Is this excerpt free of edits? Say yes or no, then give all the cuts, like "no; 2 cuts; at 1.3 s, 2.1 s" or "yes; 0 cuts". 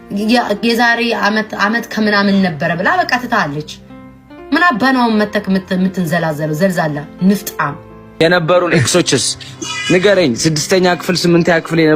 no; 1 cut; at 8.2 s